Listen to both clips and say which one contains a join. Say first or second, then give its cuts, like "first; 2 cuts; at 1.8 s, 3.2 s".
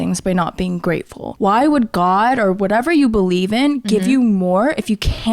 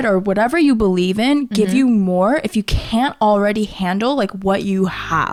first; 1 cut; at 1.2 s